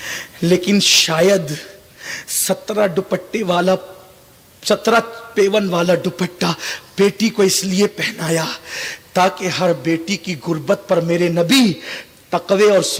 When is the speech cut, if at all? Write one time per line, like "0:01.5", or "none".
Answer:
none